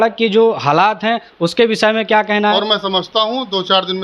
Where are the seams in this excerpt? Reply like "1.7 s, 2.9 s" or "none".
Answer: 2.5 s